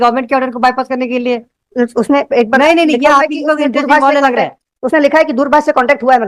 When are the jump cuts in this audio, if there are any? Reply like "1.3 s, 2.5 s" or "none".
none

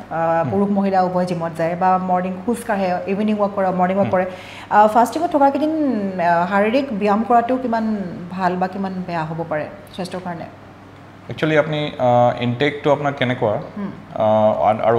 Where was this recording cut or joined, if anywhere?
none

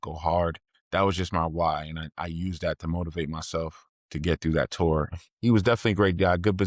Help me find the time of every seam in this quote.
5.1 s

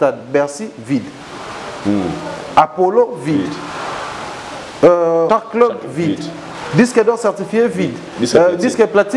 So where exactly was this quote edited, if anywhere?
5.3 s

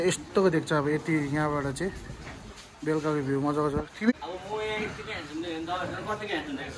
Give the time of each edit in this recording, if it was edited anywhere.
4.1 s

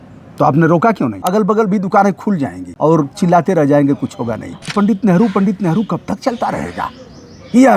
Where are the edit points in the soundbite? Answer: 1.2 s, 2.6 s, 4.6 s

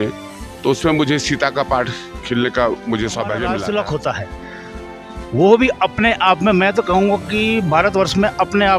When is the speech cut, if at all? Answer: 3.5 s

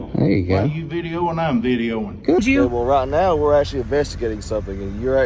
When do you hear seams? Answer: 2.4 s

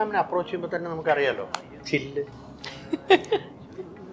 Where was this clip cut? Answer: none

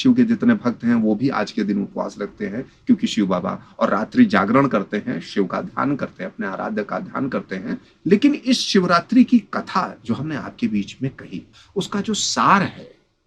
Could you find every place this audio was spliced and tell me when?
7.9 s, 11.6 s

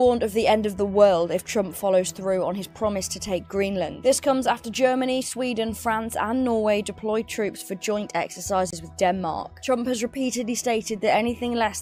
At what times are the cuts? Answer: none

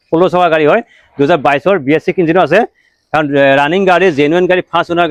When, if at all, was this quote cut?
none

